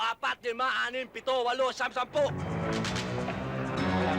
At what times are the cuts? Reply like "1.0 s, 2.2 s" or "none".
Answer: 2.4 s